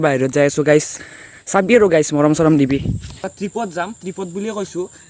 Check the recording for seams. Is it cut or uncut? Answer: cut